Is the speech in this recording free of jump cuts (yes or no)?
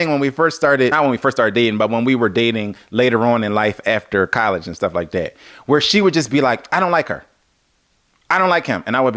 no